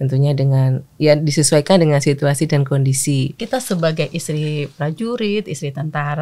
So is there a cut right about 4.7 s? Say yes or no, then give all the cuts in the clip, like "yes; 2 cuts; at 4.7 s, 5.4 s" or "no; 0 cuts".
no; 1 cut; at 3.4 s